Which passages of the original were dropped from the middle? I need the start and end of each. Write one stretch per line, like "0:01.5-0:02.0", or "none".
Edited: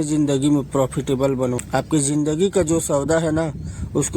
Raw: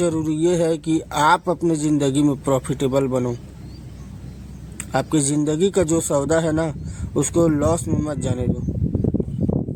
0:03.4-0:04.8